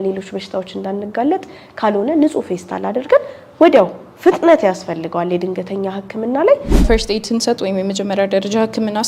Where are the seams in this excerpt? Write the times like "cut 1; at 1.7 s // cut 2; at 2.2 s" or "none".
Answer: cut 1; at 6.8 s